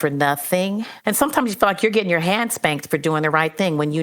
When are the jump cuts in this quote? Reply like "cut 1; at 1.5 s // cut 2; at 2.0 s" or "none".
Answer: cut 1; at 0.9 s